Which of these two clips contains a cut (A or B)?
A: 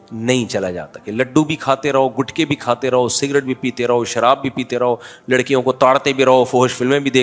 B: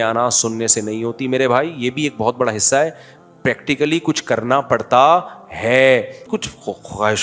B